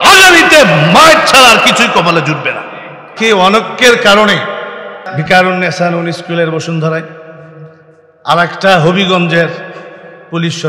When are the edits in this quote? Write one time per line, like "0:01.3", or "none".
0:03.1
0:05.1